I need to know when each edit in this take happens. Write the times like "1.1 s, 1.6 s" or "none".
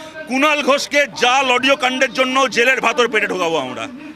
none